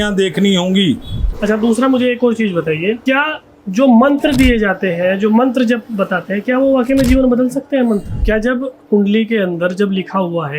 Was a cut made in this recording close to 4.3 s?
no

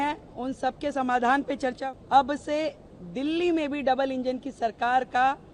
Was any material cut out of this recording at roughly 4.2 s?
no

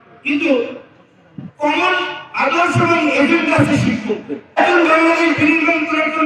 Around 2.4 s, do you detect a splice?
no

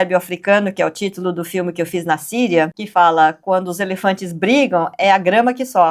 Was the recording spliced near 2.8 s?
yes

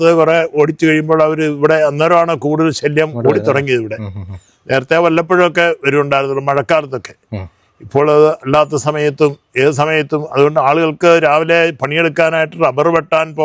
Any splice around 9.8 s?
no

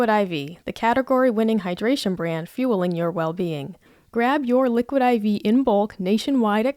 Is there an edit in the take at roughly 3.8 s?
yes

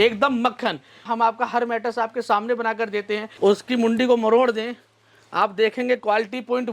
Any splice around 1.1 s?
yes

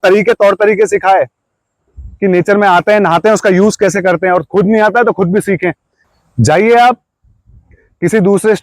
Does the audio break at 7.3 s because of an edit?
no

